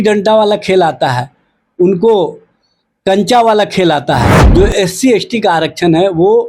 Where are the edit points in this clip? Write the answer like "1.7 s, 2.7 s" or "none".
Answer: 4.4 s